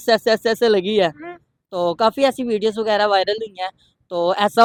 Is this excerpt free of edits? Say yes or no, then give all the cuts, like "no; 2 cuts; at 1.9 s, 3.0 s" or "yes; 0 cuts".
yes; 0 cuts